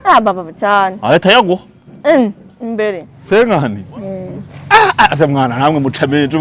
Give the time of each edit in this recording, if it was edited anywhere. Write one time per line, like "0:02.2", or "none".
0:03.1